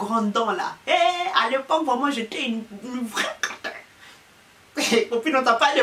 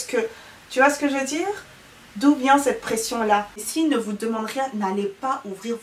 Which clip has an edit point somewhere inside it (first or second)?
second